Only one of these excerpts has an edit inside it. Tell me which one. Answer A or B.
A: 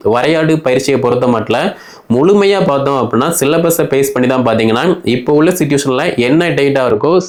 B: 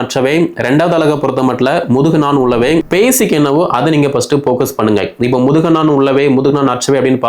B